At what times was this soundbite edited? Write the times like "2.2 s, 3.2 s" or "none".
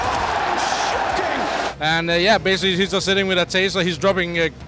1.7 s